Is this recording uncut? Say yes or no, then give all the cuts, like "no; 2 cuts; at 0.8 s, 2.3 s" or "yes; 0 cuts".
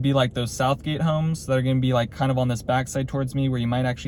yes; 0 cuts